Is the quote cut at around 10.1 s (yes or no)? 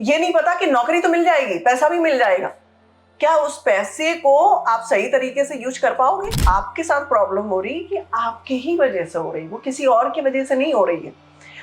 no